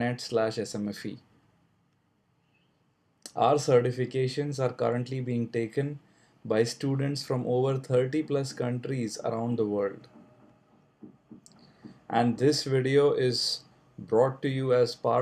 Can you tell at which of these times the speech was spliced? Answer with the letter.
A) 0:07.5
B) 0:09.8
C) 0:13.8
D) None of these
A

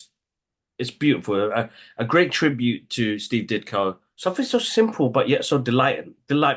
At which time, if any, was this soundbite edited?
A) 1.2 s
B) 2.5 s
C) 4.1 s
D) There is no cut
C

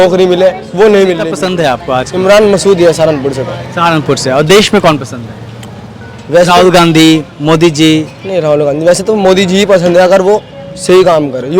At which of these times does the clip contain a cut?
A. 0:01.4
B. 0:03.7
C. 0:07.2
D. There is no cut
A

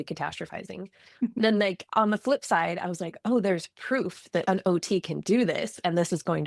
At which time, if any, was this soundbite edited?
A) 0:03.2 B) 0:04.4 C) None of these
B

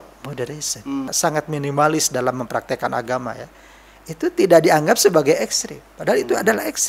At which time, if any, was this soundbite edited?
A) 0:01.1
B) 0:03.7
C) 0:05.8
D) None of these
A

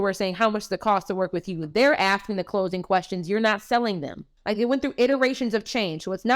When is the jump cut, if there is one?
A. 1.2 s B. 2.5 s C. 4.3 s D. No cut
C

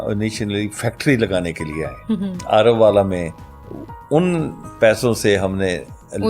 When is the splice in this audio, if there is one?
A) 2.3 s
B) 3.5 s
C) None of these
A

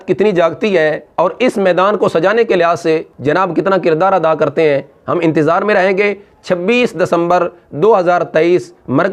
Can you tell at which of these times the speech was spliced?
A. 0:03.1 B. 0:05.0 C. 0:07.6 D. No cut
D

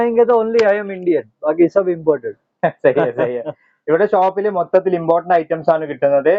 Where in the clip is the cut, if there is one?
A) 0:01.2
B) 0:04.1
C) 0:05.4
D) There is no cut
D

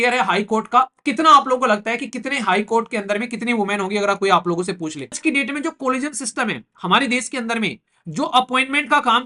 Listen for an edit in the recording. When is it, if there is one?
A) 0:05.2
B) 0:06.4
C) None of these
A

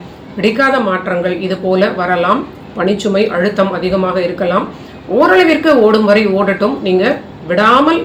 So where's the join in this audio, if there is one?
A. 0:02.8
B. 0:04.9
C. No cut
C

